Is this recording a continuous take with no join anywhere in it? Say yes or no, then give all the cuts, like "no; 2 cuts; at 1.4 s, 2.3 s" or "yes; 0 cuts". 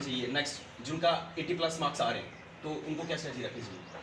yes; 0 cuts